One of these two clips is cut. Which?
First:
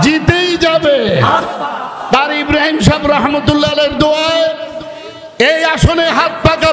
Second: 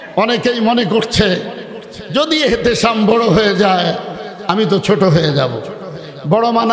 first; 1 cut; at 1.8 s

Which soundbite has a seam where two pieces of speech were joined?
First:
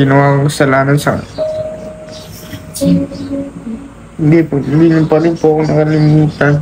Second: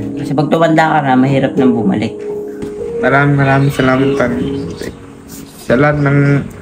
second; 1 cut; at 2.9 s

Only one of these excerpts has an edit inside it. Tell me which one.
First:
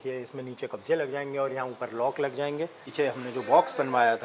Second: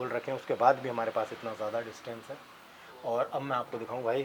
first; 1 cut; at 2.8 s

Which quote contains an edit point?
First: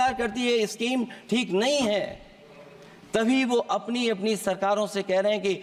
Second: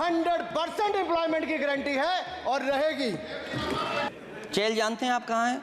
second; 1 cut; at 4.1 s

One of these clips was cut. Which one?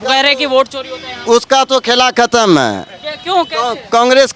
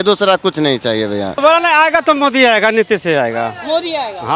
second; 1 cut; at 1.4 s

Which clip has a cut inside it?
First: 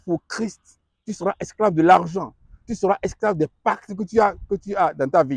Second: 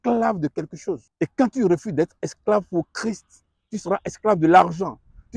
second; 1 cut; at 1.1 s

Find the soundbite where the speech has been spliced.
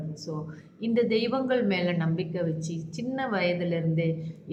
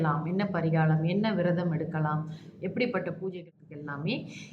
second; 1 cut; at 3.4 s

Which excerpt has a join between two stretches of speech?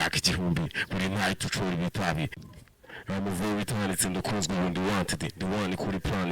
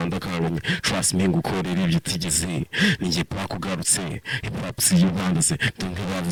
first; 1 cut; at 2.4 s

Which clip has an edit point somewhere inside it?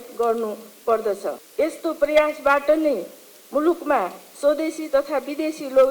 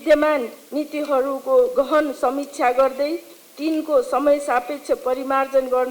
first; 1 cut; at 1.4 s

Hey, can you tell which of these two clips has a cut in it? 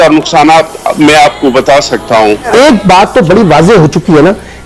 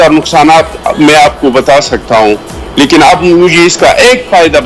first; 1 cut; at 2.5 s

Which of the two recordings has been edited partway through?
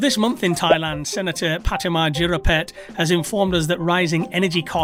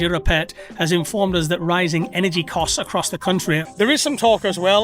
second; 1 cut; at 3.6 s

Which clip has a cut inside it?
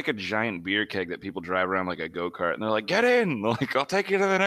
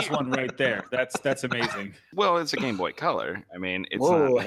second; 1 cut; at 2.0 s

